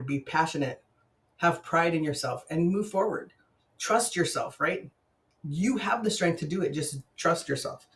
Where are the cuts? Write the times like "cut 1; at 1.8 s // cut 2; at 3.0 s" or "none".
none

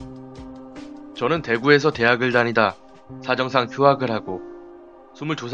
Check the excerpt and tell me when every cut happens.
cut 1; at 4.2 s

